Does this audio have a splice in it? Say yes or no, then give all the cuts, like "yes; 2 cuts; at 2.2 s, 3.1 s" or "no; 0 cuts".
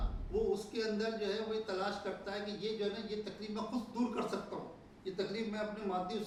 no; 0 cuts